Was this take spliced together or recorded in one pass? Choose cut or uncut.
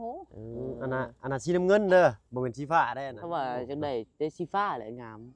cut